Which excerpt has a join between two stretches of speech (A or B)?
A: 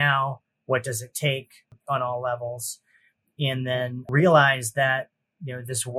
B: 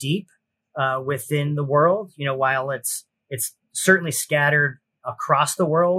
A